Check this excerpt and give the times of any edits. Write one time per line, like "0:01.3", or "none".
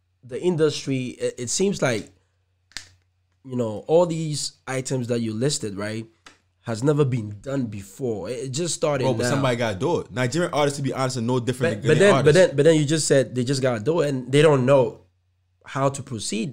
none